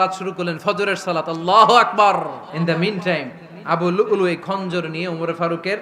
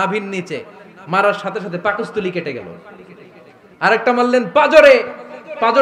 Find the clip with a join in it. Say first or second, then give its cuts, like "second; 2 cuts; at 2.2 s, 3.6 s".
first; 1 cut; at 2.5 s